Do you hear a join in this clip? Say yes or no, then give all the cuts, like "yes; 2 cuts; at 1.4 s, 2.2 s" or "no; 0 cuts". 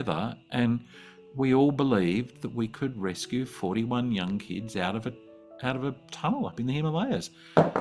no; 0 cuts